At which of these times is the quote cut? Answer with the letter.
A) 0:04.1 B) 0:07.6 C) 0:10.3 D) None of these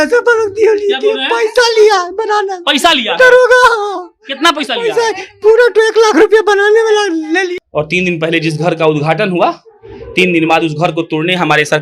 B